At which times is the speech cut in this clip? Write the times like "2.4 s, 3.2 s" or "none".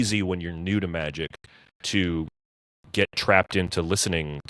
none